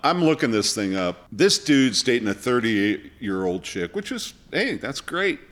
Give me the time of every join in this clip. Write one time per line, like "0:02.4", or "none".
0:01.2